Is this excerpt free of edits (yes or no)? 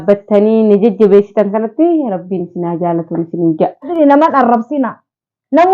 no